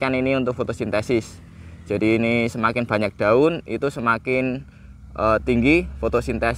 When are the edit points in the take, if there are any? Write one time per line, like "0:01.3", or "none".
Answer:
none